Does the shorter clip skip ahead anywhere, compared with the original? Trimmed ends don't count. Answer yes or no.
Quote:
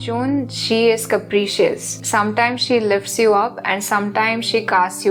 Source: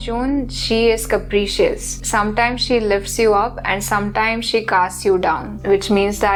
no